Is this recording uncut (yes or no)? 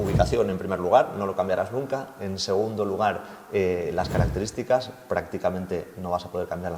yes